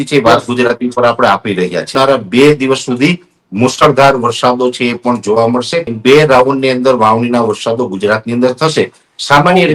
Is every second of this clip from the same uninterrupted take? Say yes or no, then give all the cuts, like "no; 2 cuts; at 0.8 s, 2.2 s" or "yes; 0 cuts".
no; 2 cuts; at 1.9 s, 5.9 s